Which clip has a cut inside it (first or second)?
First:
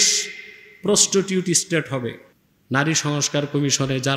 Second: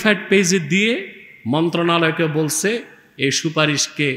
first